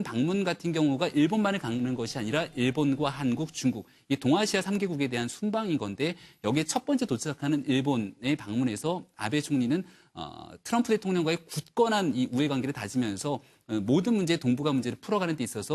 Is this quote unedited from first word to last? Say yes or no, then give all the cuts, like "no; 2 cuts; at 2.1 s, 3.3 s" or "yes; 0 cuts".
yes; 0 cuts